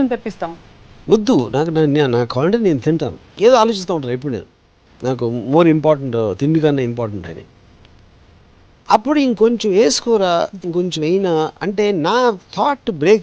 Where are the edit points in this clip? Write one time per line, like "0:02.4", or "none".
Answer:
0:03.2